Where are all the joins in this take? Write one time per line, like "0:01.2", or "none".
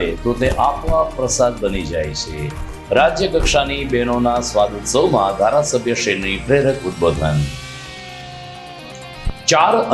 0:09.0